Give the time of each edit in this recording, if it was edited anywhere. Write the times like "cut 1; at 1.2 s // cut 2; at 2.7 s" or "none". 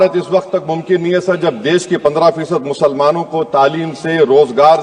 none